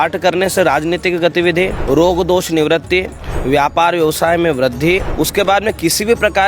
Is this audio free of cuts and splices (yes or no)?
no